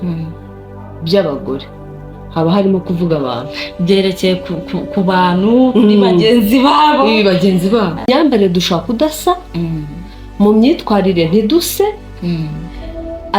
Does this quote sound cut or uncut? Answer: cut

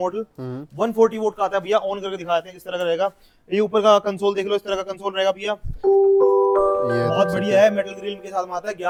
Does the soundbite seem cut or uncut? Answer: uncut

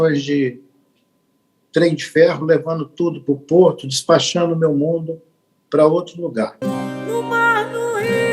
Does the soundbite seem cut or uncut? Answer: cut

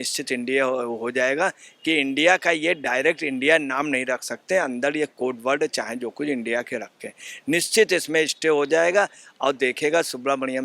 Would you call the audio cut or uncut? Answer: uncut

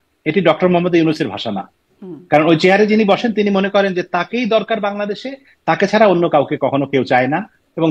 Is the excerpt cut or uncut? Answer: uncut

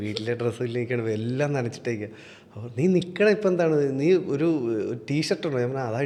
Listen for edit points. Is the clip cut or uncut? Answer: uncut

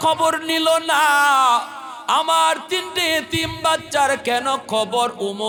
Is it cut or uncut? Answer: uncut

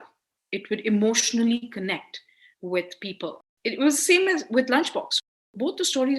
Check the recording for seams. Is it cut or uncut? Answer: cut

